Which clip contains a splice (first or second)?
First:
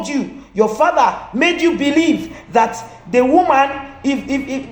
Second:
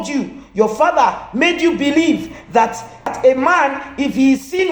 second